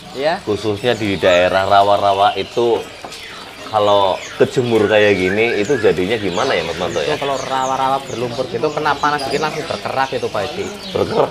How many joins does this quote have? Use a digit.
0